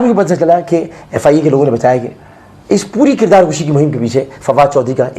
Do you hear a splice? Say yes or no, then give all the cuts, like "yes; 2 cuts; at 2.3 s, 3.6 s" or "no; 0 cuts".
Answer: no; 0 cuts